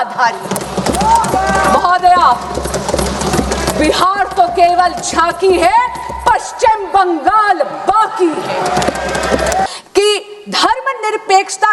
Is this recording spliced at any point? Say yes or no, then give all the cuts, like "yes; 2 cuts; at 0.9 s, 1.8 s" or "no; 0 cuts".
yes; 1 cut; at 9.7 s